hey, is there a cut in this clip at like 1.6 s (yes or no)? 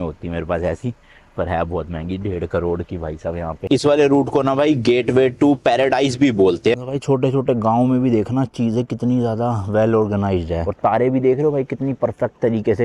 no